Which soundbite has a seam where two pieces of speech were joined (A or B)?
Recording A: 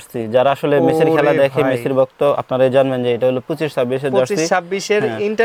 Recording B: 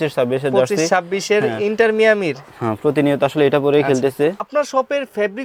B